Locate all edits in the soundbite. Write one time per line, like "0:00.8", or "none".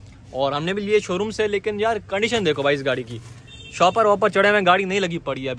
none

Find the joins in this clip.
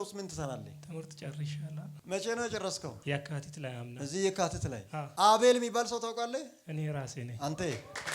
0:05.0

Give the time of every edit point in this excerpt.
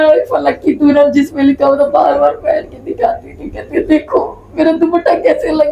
none

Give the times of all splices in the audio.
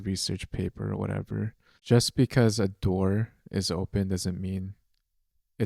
0:01.8

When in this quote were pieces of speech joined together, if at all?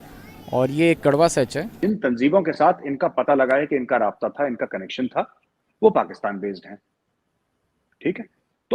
0:01.7

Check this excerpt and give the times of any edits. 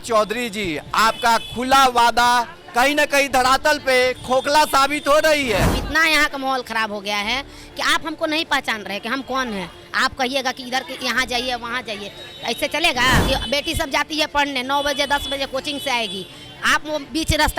0:05.8
0:13.2

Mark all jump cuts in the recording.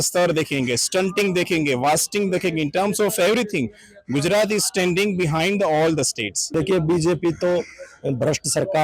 0:06.4

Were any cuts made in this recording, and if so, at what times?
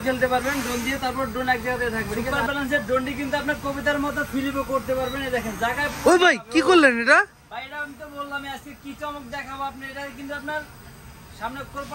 none

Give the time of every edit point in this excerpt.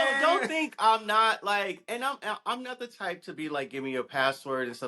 none

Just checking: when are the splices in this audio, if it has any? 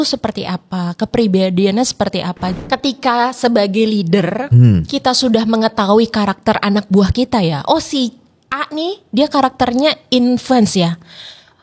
0:02.5

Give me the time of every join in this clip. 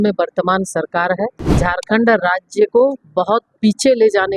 0:01.4

